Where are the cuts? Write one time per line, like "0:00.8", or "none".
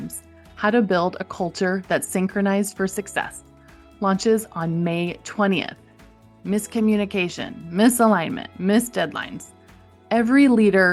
none